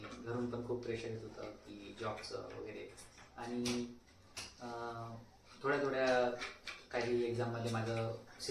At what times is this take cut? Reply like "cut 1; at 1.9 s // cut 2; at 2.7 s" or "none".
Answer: none